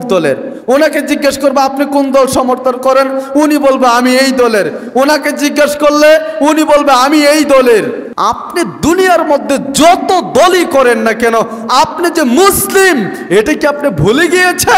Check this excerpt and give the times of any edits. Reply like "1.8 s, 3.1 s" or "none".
8.1 s